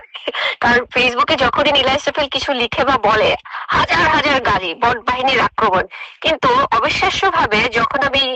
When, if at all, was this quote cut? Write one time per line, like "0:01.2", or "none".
none